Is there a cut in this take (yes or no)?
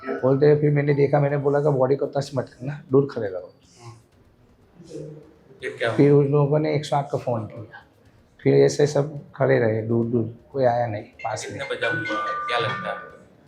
no